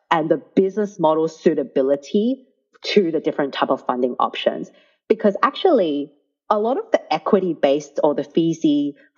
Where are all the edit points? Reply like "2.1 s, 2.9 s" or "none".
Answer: none

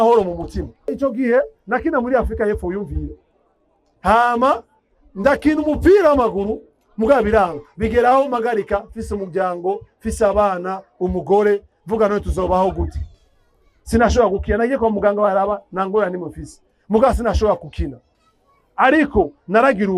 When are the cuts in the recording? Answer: 0.9 s

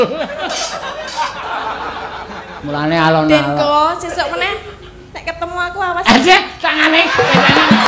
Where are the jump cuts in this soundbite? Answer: 1.4 s

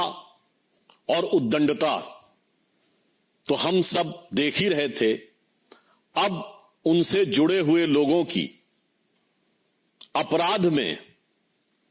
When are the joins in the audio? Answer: none

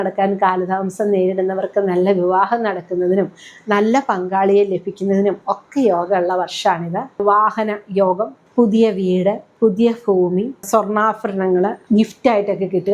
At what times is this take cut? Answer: 7.2 s, 8.4 s, 9.5 s, 10.6 s, 11.8 s

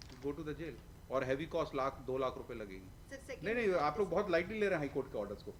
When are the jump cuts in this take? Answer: none

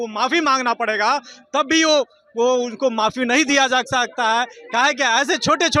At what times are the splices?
none

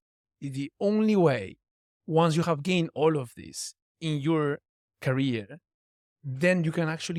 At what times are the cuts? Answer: none

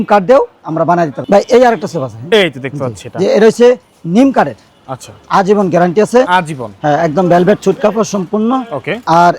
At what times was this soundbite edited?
1.2 s

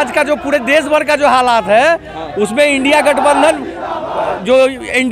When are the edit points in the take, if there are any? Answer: none

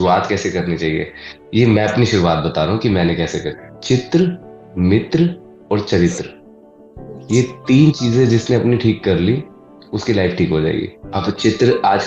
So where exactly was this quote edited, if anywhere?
3.7 s, 11.0 s

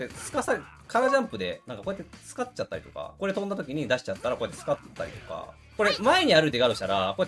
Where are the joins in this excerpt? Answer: 5.5 s

